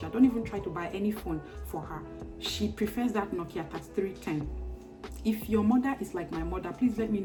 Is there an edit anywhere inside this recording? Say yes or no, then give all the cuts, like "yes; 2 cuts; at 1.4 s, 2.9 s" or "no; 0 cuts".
no; 0 cuts